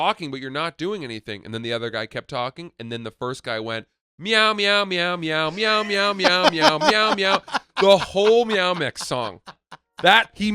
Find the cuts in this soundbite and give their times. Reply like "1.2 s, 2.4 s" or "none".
none

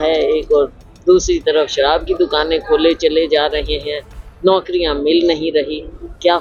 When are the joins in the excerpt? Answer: none

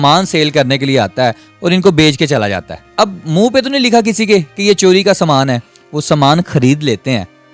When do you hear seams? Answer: 2.9 s

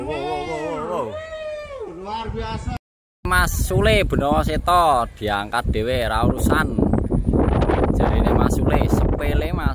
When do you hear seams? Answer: 2.8 s

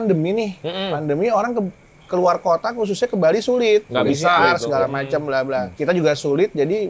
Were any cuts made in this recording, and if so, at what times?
5.7 s

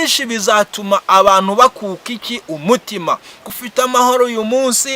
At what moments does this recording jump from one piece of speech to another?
3.6 s

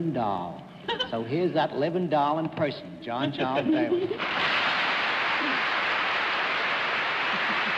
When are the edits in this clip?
none

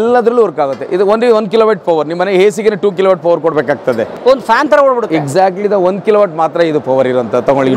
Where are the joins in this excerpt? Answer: none

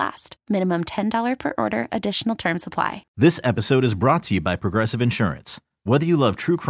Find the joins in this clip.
3.0 s

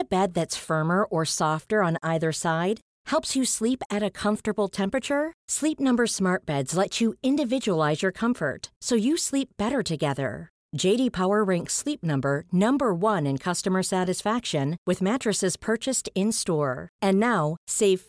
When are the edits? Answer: none

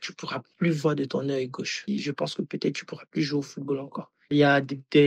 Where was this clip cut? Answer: 1.8 s, 4.3 s

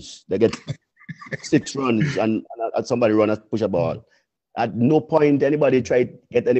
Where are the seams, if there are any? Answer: none

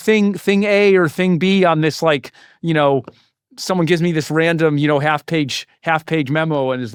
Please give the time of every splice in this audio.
none

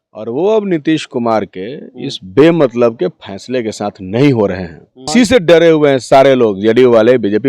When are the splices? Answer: 5.1 s

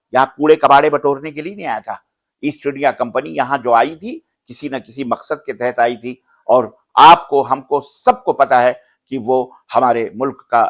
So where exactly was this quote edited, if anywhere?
none

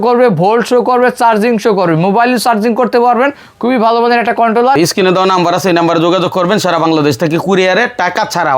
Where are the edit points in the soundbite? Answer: 4.8 s

